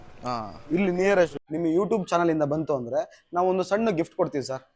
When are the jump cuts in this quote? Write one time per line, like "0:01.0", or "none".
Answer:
0:01.3